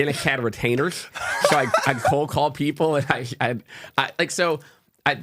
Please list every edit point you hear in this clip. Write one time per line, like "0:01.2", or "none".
none